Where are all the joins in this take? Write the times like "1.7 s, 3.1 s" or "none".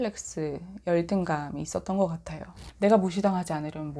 2.6 s